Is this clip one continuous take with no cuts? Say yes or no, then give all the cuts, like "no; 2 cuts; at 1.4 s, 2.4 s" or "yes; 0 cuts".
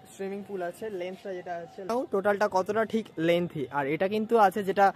yes; 0 cuts